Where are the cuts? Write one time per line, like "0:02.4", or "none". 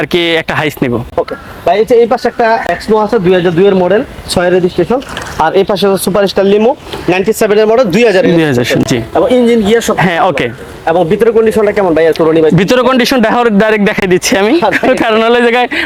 none